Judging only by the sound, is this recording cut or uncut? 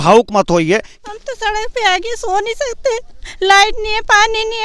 cut